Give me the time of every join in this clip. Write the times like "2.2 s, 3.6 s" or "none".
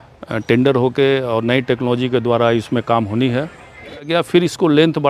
4.1 s